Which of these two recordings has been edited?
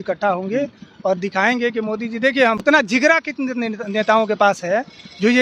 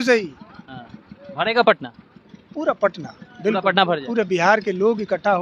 first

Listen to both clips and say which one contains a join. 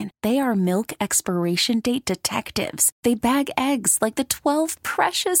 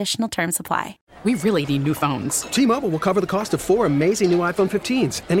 second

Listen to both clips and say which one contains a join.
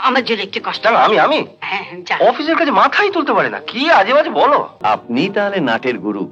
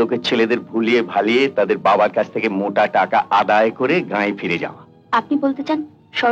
first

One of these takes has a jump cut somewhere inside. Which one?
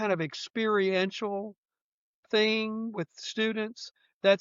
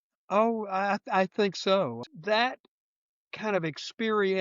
second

